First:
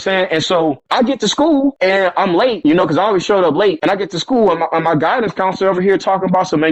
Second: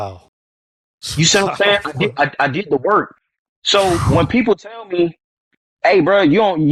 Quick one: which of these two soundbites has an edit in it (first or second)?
first